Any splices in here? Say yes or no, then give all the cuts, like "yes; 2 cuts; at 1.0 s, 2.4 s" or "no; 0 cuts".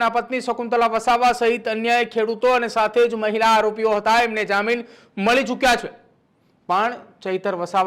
no; 0 cuts